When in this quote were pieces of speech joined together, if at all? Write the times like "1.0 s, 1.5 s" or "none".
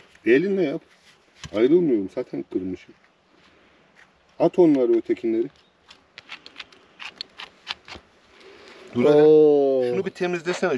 none

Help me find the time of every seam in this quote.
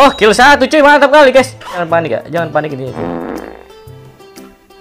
2.1 s

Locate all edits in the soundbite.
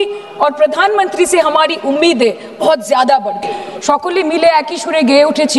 3.7 s

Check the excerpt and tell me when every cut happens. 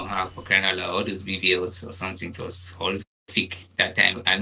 none

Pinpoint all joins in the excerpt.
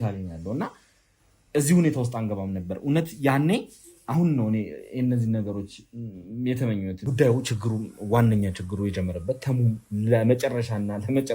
7.0 s

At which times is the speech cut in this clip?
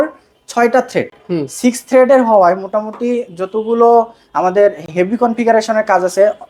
none

